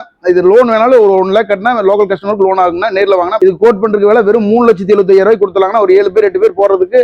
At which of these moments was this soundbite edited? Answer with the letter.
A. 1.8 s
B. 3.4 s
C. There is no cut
B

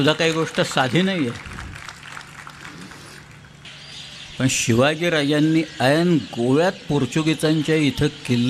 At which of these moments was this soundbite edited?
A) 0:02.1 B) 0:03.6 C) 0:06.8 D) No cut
B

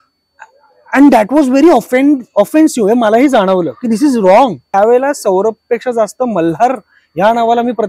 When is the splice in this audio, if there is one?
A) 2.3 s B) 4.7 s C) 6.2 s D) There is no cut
B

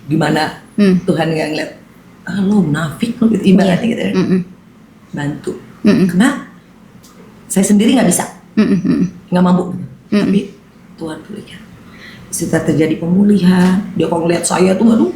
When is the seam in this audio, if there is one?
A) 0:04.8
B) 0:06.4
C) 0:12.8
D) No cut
D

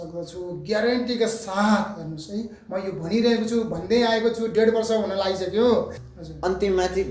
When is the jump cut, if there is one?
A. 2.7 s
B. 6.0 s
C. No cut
B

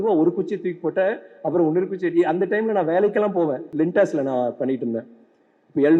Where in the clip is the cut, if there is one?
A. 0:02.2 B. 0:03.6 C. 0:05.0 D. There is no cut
B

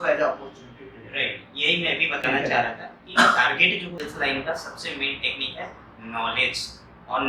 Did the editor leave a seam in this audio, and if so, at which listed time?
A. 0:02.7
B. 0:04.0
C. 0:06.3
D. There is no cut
B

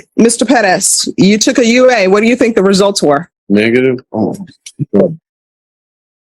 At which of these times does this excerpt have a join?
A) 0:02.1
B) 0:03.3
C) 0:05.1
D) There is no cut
B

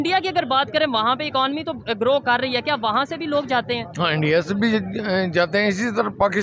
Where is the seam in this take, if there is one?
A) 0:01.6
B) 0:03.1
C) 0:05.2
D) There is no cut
D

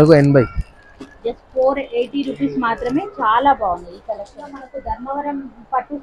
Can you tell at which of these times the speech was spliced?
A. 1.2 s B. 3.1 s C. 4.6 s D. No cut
C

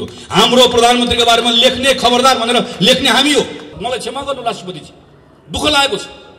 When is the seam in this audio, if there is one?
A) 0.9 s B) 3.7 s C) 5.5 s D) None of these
B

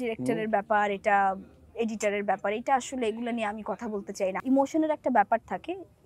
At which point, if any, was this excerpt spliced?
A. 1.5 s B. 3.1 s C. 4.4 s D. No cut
C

